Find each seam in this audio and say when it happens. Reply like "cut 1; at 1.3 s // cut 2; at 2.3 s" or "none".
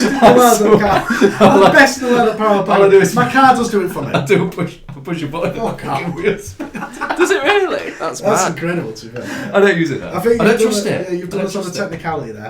none